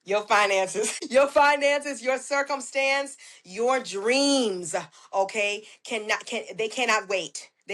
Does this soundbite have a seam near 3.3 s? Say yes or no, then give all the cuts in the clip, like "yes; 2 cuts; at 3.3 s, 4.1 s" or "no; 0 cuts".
no; 1 cut; at 1.0 s